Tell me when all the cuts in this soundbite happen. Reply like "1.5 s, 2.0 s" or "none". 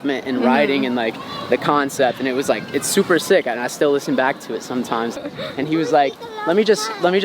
5.1 s